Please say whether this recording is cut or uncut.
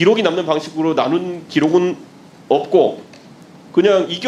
uncut